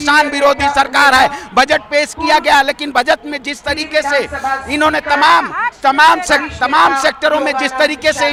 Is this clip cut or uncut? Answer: uncut